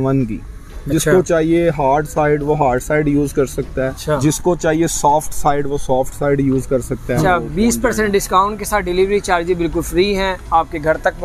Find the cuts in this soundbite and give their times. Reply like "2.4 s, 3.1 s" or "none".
4.0 s, 7.2 s